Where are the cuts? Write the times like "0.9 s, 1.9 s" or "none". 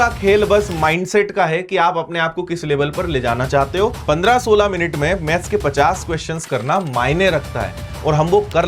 4.0 s

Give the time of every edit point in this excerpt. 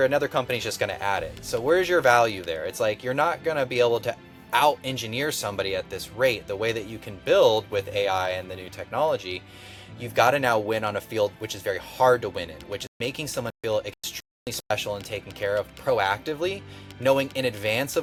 none

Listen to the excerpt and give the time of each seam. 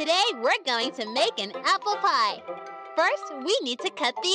0.9 s, 2.4 s

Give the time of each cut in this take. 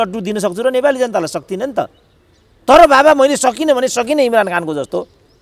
none

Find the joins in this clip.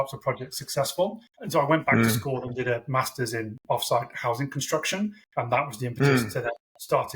1.3 s, 5.2 s

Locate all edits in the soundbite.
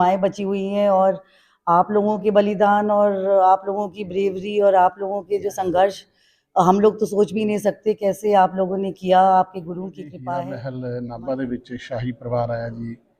10.5 s

